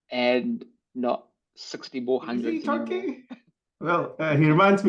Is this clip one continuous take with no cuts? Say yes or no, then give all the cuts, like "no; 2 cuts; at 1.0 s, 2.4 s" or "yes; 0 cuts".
no; 1 cut; at 2.6 s